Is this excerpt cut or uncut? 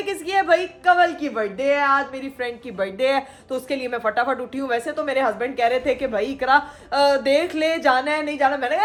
uncut